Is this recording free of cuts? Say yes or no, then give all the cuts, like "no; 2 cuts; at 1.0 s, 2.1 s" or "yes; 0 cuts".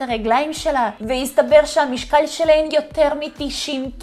yes; 0 cuts